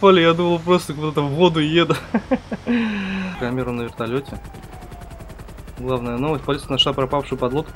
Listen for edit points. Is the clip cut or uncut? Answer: cut